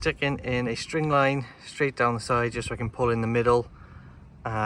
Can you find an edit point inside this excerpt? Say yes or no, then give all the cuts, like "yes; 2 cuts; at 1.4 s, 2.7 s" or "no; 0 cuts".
no; 0 cuts